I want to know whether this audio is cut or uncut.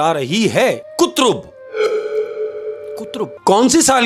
cut